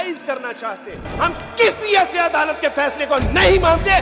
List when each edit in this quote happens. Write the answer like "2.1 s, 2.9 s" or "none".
1.1 s